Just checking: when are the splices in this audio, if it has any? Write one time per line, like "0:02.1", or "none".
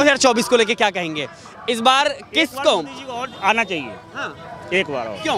none